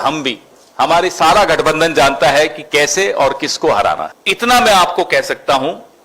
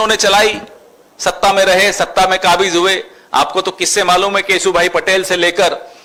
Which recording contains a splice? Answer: first; 1 cut; at 4.2 s

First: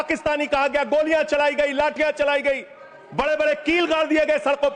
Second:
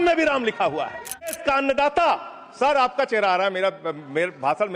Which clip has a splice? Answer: second; 1 cut; at 1.4 s

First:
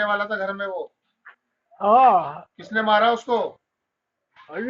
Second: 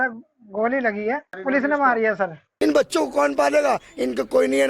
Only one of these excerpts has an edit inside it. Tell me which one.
second; 2 cuts; at 1.3 s, 2.4 s

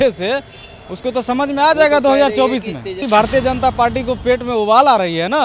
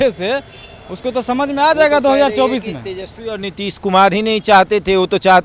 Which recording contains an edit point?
first; 1 cut; at 3.0 s

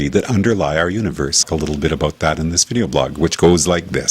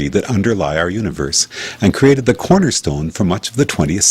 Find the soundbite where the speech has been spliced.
second; 1 cut; at 1.4 s

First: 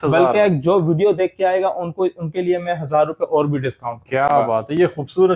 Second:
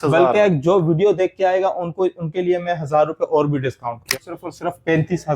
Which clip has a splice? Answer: second; 1 cut; at 4.1 s

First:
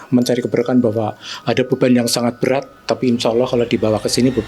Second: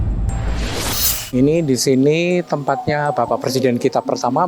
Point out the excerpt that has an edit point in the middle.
second; 1 cut; at 1.3 s

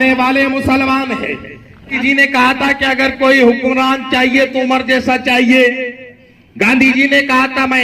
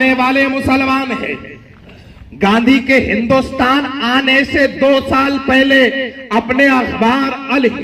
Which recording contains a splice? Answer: first; 1 cut; at 2.0 s

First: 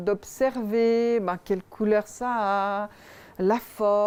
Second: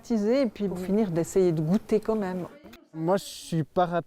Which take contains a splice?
second; 1 cut; at 2.5 s

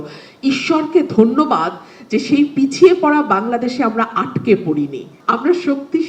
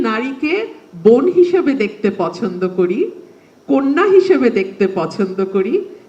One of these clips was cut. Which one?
first; 1 cut; at 5.1 s

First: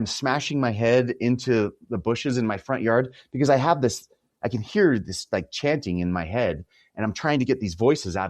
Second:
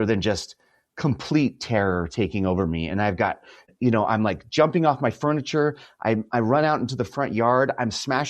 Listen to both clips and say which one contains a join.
second; 1 cut; at 3.7 s

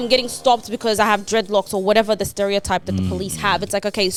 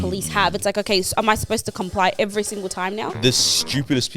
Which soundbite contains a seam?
second; 1 cut; at 3.2 s

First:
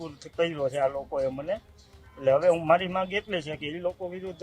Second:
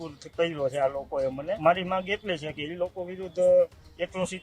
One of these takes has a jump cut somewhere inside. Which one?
second; 1 cut; at 1.6 s

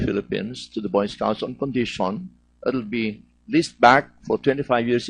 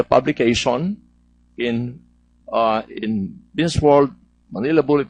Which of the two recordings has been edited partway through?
first; 1 cut; at 1.4 s

